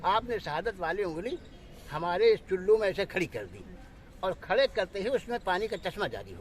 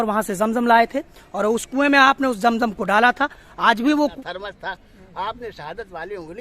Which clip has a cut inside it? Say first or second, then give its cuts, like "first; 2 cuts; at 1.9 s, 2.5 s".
second; 1 cut; at 4.1 s